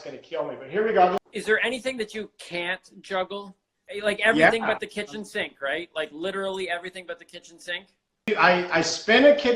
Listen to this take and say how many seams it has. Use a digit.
3